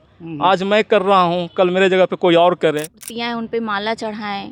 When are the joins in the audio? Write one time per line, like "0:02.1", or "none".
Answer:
0:03.1